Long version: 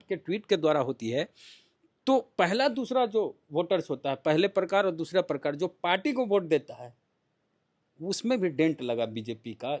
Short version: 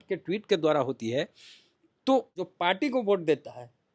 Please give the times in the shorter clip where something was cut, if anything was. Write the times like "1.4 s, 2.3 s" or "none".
2.3 s